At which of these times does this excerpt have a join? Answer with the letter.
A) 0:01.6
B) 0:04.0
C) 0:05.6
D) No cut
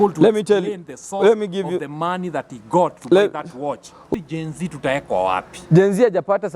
B